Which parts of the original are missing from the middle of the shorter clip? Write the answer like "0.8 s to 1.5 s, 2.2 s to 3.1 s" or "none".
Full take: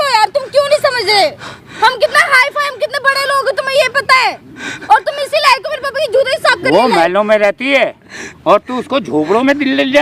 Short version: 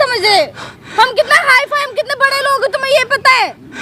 none